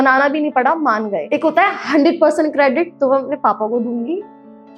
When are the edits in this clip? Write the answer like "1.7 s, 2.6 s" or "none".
1.2 s